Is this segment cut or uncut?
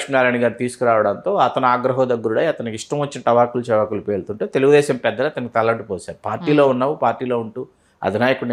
uncut